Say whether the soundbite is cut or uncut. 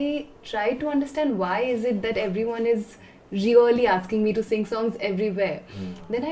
uncut